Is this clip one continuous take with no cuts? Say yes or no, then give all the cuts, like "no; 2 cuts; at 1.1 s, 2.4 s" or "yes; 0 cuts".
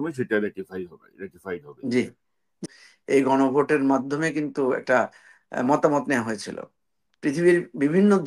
no; 1 cut; at 2.6 s